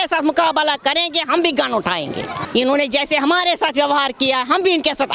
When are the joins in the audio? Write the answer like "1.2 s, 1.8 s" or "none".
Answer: 2.4 s